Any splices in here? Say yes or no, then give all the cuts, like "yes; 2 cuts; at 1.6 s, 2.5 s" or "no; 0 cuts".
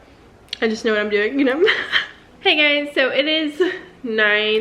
no; 0 cuts